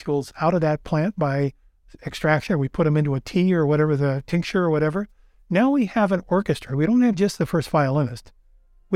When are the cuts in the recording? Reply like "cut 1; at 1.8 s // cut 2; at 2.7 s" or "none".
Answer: none